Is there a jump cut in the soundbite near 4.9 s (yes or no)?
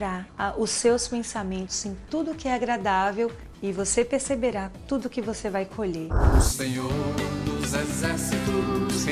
no